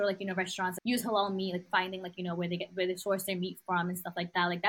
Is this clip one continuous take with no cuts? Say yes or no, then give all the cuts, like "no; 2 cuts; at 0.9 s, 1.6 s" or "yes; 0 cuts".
no; 2 cuts; at 0.8 s, 1.6 s